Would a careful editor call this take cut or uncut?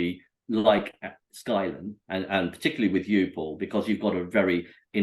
uncut